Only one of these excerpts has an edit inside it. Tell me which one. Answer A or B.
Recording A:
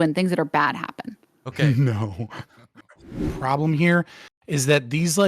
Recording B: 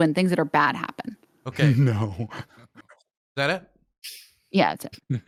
A